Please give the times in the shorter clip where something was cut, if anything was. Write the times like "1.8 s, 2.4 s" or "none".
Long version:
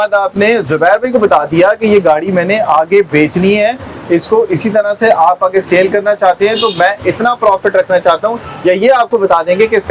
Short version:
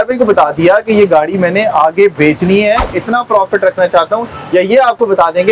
2.9 s

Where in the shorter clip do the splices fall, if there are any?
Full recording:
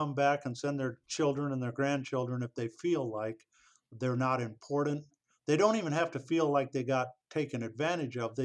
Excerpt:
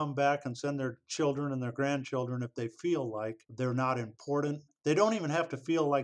3.4 s, 4.7 s

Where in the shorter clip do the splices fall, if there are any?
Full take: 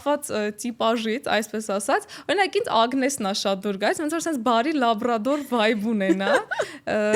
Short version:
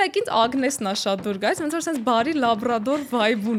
none

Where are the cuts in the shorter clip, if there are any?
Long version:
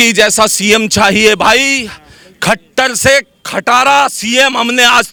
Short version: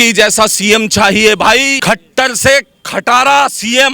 1.7 s

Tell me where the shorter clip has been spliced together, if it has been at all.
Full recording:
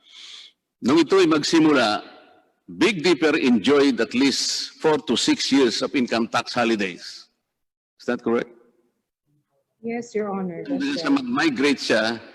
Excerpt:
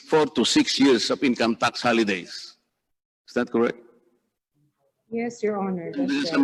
none

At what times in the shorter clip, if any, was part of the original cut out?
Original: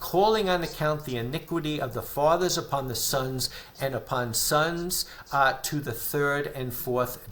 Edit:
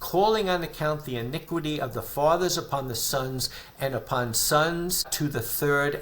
5.1 s

